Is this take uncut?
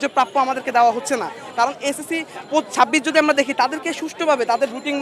yes; 0 cuts

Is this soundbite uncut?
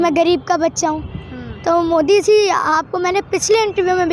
yes; 0 cuts

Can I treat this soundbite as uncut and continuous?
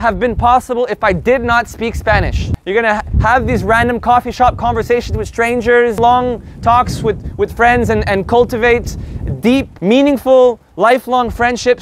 no; 4 cuts; at 2.5 s, 6.0 s, 9.7 s, 10.7 s

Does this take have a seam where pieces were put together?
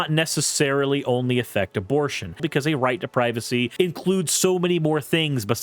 yes; 2 cuts; at 2.4 s, 3.7 s

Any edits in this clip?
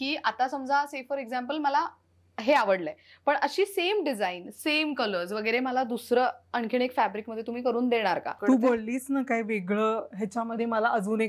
yes; 1 cut; at 8.3 s

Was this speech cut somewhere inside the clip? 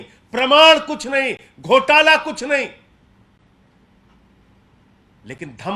no; 0 cuts

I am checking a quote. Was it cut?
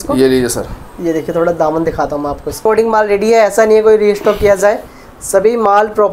yes; 1 cut; at 2.6 s

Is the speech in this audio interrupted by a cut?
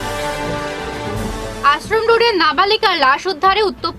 no; 0 cuts

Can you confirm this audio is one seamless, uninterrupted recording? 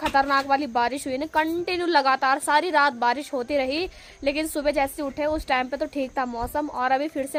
yes; 0 cuts

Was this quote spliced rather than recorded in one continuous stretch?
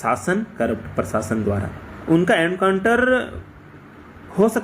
yes; 1 cut; at 1.9 s

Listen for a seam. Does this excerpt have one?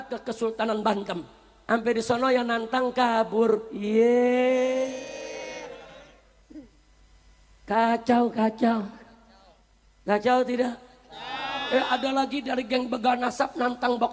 no; 0 cuts

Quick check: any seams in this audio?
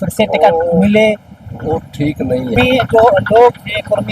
yes; 1 cut; at 2.6 s

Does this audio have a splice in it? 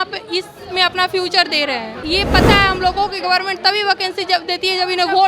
yes; 1 cut; at 2.0 s

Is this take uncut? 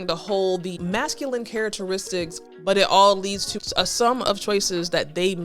no; 3 cuts; at 0.8 s, 2.4 s, 3.5 s

